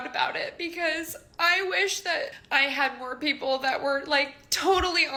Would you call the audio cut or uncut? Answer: uncut